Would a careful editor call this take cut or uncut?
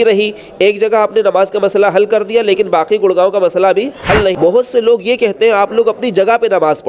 cut